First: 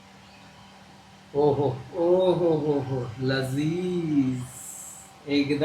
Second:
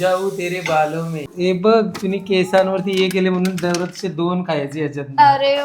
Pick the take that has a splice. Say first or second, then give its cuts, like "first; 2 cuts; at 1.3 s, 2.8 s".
second; 1 cut; at 1.3 s